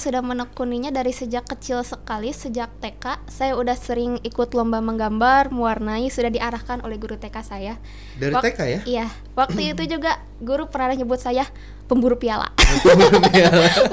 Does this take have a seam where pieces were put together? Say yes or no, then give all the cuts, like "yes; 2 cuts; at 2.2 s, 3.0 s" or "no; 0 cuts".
no; 0 cuts